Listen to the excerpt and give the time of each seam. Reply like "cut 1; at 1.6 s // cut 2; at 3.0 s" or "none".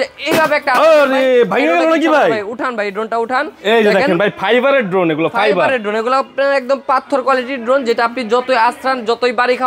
none

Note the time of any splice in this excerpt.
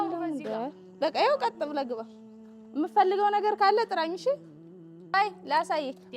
cut 1; at 5.0 s

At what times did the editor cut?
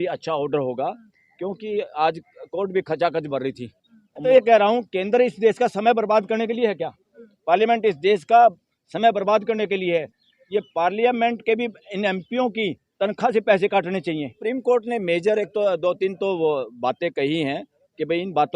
cut 1; at 4.2 s // cut 2; at 14.3 s

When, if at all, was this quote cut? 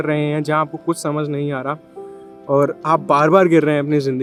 none

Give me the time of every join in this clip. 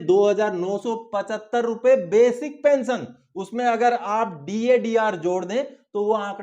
none

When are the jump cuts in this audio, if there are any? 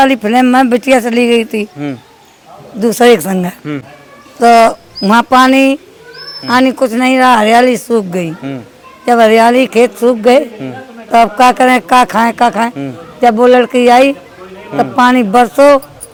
none

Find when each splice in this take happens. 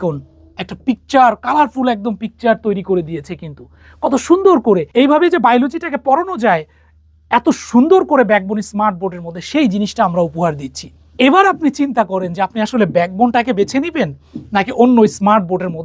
cut 1; at 11.1 s

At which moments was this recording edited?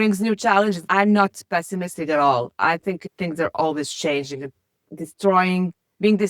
cut 1; at 0.8 s // cut 2; at 3.1 s

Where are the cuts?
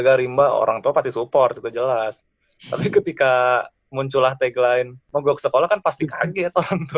cut 1; at 5.0 s

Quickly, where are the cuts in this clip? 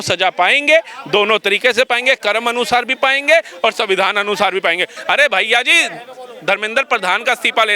cut 1; at 5.0 s

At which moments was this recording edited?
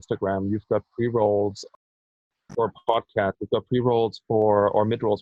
none

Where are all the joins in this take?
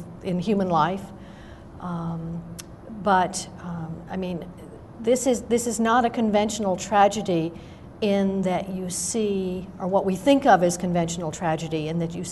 cut 1; at 3.3 s

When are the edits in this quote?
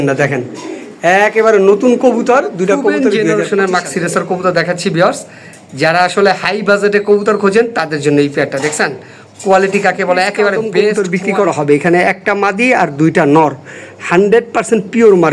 cut 1; at 3.2 s // cut 2; at 11.0 s

